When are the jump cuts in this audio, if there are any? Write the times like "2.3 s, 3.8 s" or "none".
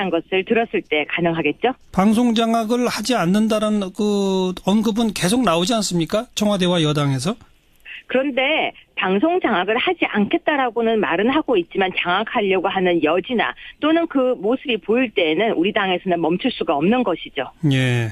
11.0 s